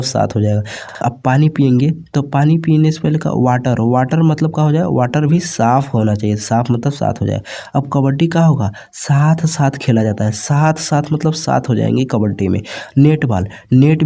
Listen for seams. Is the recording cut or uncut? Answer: cut